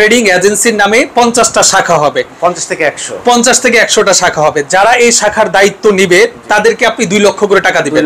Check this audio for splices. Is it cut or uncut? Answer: uncut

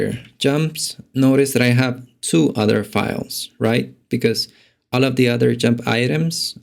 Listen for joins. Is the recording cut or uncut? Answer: uncut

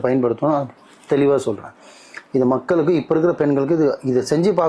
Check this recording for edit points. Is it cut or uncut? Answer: uncut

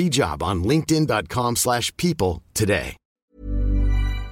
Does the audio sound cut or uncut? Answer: cut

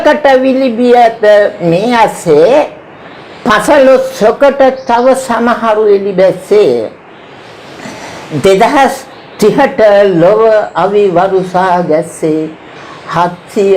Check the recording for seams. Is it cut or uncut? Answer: uncut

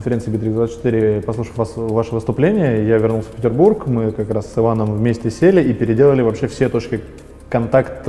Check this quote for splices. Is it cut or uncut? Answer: uncut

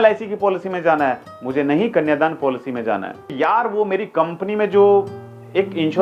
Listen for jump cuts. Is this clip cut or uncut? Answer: cut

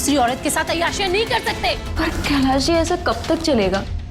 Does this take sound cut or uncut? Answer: cut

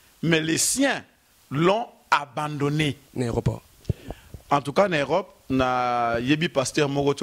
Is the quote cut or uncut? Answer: cut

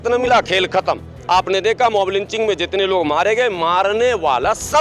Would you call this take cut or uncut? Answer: uncut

